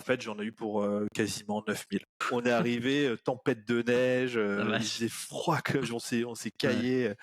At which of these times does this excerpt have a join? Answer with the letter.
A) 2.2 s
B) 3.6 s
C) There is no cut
A